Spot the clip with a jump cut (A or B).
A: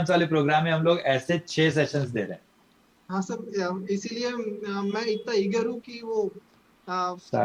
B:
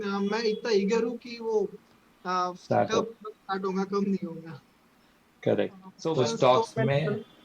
B